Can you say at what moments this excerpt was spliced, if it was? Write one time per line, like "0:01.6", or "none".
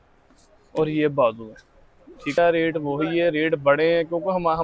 0:02.3